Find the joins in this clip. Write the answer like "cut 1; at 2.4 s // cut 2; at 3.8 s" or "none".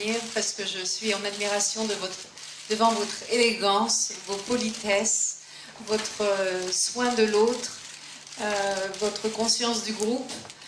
cut 1; at 6.2 s